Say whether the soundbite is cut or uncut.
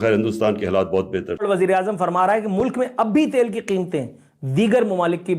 uncut